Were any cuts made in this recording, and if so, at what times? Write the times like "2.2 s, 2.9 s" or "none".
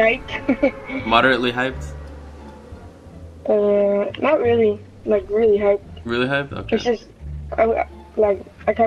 none